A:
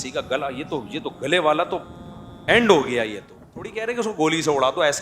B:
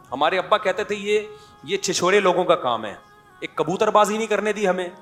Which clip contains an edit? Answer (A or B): A